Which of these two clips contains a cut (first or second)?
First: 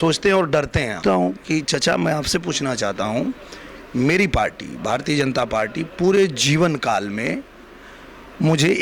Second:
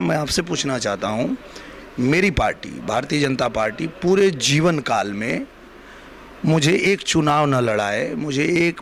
first